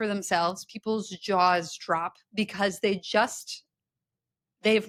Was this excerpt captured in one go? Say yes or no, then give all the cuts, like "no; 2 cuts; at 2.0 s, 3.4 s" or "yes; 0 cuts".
yes; 0 cuts